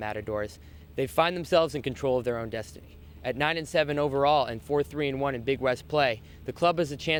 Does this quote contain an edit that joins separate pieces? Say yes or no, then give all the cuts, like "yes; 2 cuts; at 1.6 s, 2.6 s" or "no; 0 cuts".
no; 0 cuts